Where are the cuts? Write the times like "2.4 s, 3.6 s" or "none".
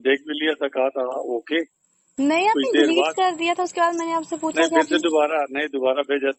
none

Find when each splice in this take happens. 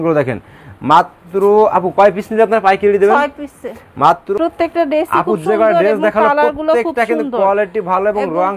4.2 s

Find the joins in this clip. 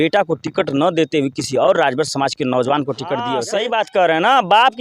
3.4 s

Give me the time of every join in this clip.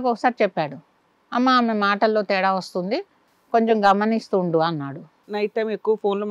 5.2 s

